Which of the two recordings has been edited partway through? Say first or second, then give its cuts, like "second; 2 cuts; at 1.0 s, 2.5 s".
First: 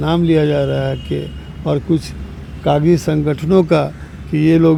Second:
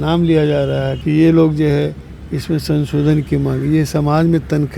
second; 1 cut; at 0.9 s